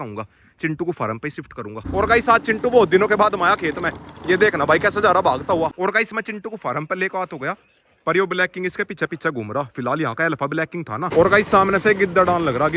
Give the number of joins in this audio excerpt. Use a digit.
3